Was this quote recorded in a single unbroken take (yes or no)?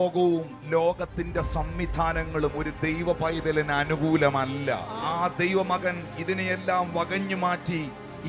yes